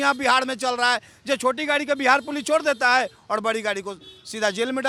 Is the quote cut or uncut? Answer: uncut